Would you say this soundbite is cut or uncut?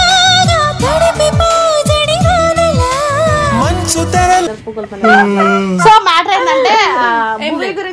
uncut